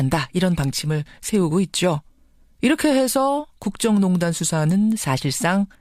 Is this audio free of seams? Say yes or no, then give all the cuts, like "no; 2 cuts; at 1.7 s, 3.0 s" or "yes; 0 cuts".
yes; 0 cuts